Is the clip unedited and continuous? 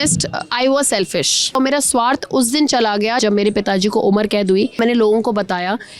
no; 3 cuts; at 1.5 s, 3.2 s, 4.8 s

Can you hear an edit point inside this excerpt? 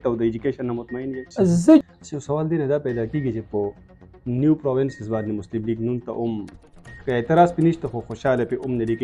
yes; 1 cut; at 1.8 s

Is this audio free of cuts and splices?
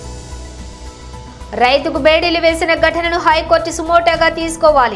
yes; 0 cuts

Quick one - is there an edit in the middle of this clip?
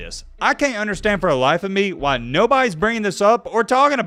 no; 0 cuts

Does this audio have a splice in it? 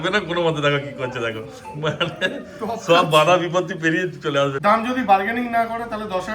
yes; 1 cut; at 4.6 s

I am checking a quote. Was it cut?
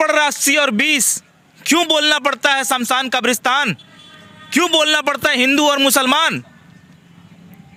no; 0 cuts

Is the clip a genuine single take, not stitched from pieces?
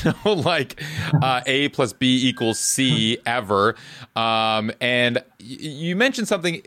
yes; 0 cuts

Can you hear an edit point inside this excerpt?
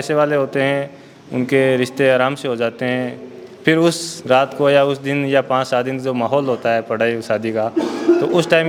no; 0 cuts

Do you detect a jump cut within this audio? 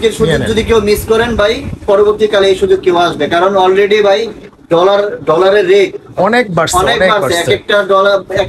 no; 0 cuts

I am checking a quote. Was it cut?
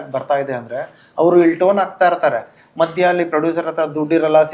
no; 0 cuts

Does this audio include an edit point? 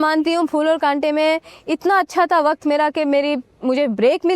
no; 0 cuts

